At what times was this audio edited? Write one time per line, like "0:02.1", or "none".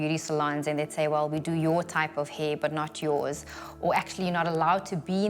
none